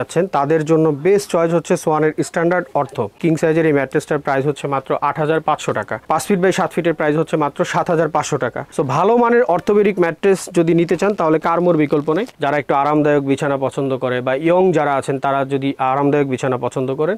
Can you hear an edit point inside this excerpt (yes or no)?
yes